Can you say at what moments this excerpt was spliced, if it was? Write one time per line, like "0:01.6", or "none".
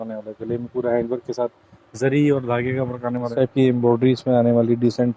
0:03.3